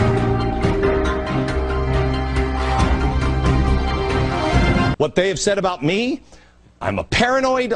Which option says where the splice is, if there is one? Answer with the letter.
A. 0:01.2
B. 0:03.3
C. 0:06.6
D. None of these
A